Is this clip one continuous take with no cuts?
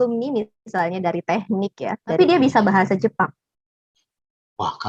no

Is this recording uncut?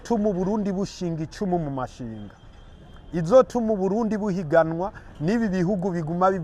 yes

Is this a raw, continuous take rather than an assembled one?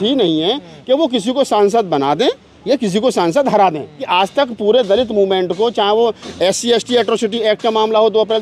no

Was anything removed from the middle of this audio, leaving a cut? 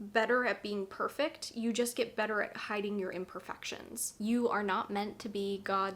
yes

